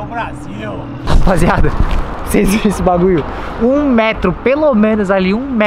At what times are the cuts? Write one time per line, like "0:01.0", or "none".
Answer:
none